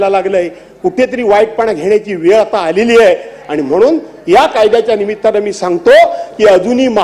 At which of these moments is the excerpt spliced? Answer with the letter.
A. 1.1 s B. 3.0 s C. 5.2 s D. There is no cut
D